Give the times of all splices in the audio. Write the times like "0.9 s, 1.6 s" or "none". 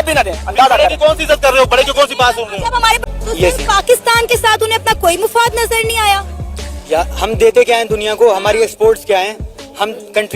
3.1 s